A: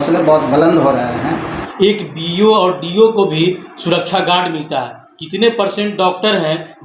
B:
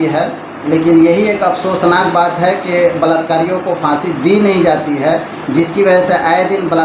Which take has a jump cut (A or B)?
A